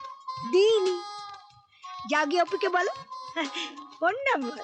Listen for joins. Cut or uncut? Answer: uncut